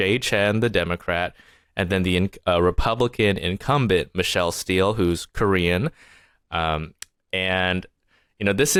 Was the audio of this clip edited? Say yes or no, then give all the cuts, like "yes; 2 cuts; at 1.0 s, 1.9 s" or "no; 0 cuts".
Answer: no; 0 cuts